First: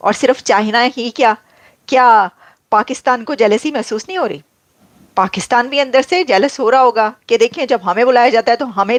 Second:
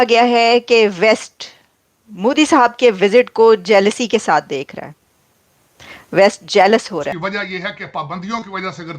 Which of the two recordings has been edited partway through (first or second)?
second